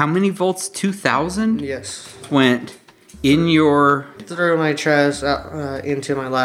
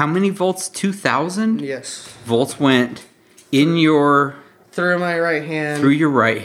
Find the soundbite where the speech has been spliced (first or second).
first